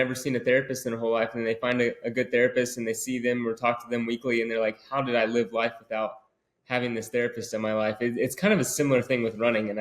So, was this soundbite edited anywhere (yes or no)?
no